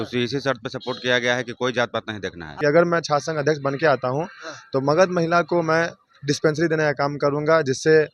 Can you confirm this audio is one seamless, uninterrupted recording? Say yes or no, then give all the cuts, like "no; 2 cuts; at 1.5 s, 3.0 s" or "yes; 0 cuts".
no; 1 cut; at 2.6 s